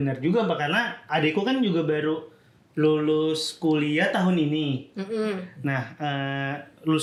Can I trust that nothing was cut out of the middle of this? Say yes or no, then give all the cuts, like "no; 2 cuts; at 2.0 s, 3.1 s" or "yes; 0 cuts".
yes; 0 cuts